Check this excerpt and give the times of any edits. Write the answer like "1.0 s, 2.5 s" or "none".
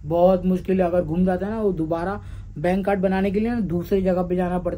none